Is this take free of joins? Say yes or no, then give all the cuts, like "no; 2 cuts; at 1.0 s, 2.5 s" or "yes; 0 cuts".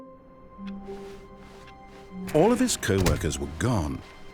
no; 1 cut; at 2.3 s